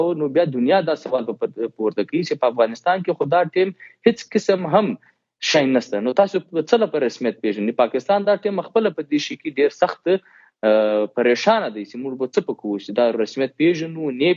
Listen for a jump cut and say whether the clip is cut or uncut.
uncut